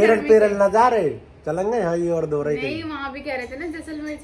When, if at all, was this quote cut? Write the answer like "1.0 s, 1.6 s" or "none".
none

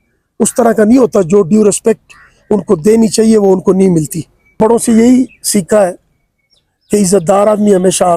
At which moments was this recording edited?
4.6 s

